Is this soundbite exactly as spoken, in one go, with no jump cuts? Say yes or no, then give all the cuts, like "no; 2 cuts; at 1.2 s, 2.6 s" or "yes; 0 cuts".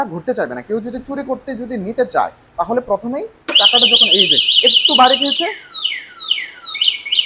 yes; 0 cuts